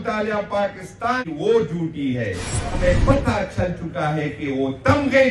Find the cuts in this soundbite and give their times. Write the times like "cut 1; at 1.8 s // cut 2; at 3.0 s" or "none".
cut 1; at 1.2 s // cut 2; at 2.7 s